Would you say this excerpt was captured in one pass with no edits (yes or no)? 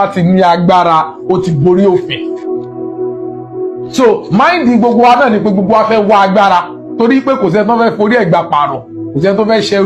yes